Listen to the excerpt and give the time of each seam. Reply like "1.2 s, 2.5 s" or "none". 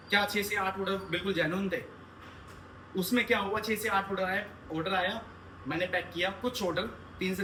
none